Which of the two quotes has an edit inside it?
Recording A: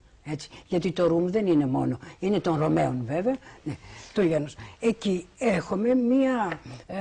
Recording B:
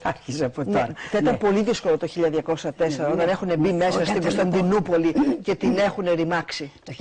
A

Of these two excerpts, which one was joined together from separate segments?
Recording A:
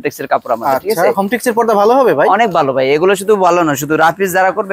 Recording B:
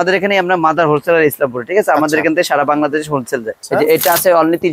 B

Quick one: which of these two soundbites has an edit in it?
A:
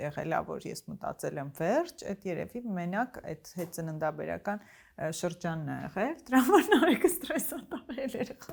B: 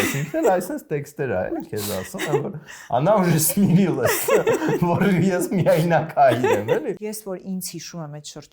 B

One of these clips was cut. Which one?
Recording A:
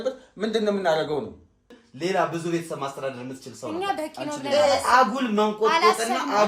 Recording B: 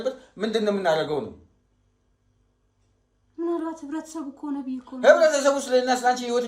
A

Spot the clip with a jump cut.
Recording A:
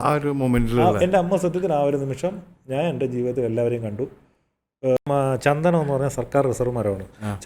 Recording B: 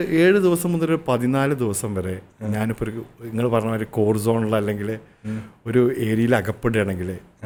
A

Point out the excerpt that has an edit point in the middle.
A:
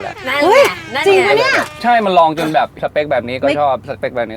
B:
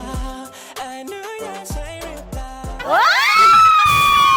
A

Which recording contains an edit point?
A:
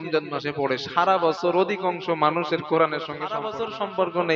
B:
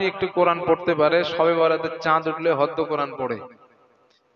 A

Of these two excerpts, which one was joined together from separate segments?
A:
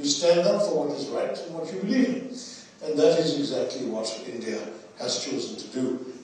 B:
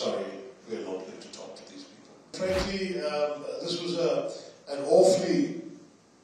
B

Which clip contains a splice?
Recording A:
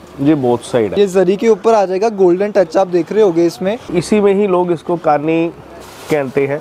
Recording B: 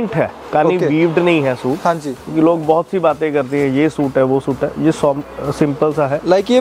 A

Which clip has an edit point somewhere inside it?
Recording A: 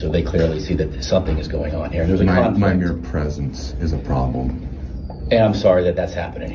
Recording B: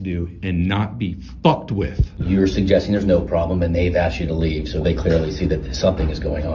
B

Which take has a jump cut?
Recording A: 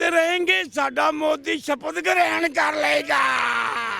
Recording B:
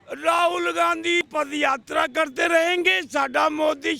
B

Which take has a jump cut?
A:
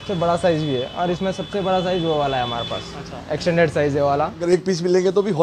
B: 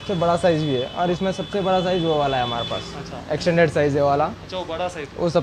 A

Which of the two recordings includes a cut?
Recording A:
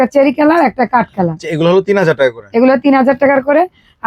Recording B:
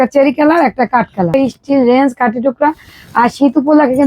B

